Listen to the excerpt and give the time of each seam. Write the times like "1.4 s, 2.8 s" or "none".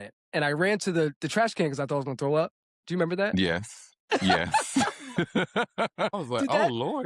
1.2 s, 6.2 s

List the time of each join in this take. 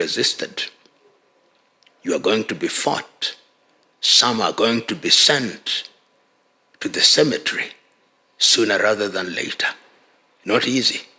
none

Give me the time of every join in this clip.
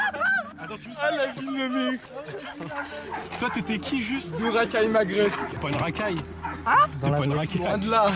5.5 s

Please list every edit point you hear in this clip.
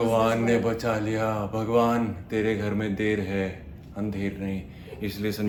none

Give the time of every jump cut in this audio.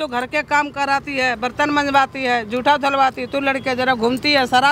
none

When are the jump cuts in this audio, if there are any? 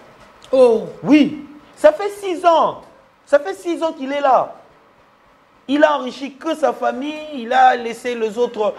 none

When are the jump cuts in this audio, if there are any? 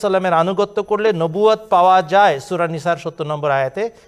none

